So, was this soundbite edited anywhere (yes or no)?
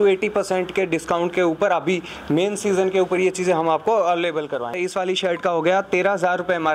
yes